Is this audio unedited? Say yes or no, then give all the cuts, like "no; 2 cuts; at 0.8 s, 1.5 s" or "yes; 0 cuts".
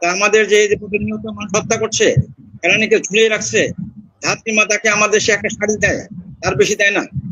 yes; 0 cuts